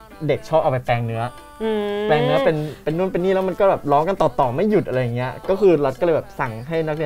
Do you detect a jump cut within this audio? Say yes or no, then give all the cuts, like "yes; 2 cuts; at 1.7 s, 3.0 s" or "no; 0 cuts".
no; 0 cuts